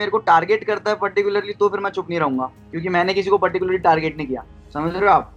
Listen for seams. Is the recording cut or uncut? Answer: uncut